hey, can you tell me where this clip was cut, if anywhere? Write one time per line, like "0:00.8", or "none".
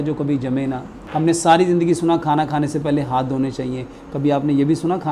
0:01.0